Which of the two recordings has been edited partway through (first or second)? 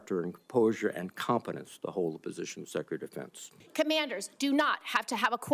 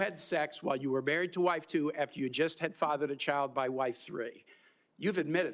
first